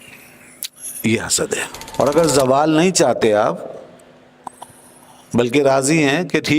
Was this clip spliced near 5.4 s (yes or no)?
no